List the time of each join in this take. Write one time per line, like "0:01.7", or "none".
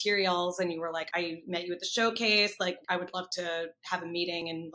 0:01.1
0:02.8